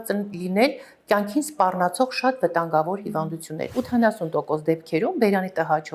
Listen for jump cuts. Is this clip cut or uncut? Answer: cut